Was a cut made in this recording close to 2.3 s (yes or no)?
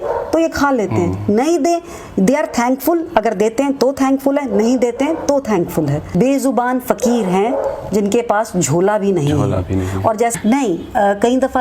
no